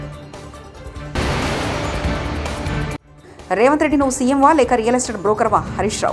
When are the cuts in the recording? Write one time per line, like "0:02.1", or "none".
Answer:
0:01.0
0:03.0

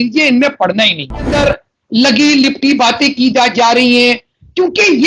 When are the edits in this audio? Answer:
0:01.3

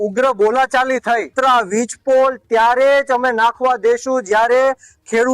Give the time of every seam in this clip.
0:01.3

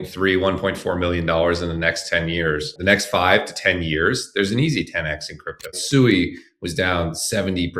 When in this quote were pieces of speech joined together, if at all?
0:02.7
0:05.7

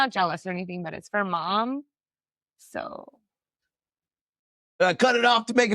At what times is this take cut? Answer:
0:04.6

